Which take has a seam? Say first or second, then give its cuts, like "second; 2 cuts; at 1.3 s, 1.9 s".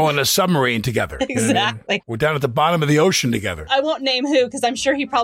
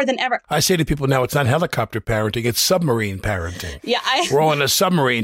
first; 1 cut; at 2.1 s